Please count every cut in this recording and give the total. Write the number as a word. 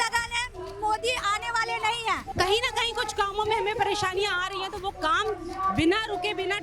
one